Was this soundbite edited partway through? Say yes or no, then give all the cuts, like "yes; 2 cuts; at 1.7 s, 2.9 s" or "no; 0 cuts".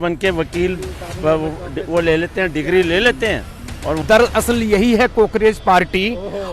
yes; 1 cut; at 4.0 s